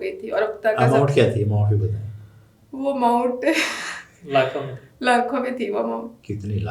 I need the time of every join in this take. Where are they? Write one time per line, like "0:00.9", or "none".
none